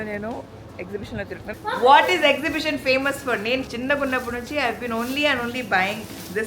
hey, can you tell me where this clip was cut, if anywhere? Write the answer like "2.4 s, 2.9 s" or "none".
1.5 s